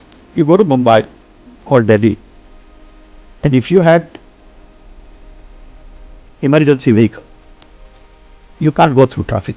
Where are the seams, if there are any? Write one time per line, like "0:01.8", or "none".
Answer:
none